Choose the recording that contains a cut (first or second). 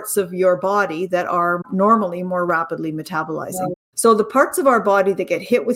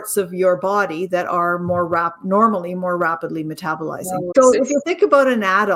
first